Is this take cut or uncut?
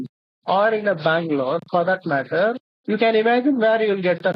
uncut